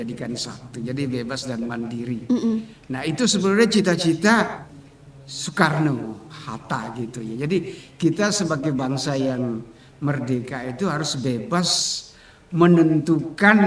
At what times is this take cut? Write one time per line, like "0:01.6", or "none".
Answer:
none